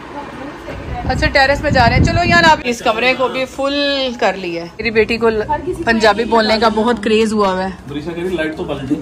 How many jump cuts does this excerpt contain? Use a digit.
2